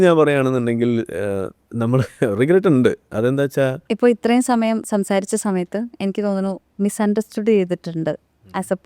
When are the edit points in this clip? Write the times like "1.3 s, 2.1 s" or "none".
3.8 s, 6.7 s